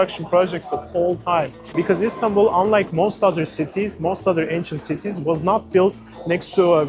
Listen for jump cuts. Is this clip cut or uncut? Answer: cut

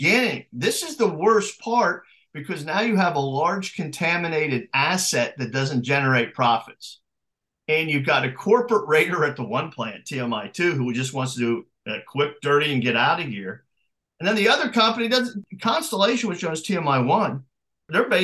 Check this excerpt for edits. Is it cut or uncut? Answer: cut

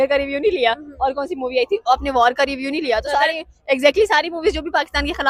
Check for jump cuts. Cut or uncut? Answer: uncut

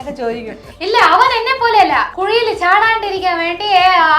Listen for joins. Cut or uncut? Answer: cut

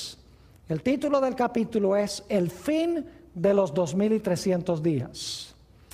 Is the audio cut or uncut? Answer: cut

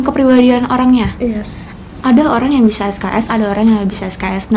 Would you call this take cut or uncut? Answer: uncut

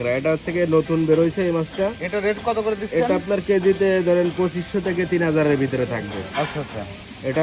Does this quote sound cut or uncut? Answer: uncut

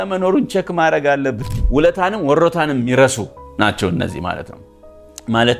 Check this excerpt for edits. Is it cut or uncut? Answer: cut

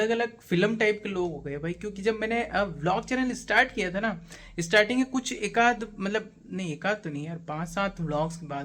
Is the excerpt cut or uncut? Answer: uncut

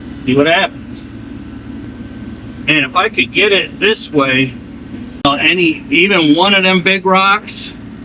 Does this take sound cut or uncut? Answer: cut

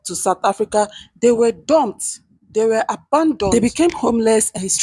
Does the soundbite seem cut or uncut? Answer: uncut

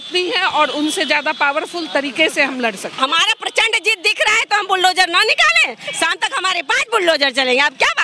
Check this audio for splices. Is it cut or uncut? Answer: cut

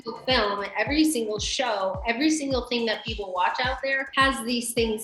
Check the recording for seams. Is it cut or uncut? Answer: cut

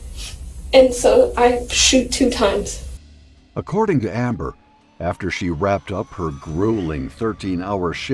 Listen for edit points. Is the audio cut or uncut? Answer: uncut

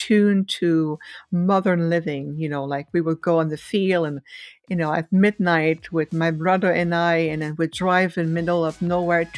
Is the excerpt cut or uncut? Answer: uncut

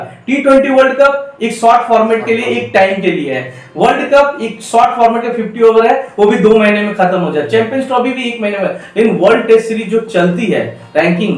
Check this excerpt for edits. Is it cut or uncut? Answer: uncut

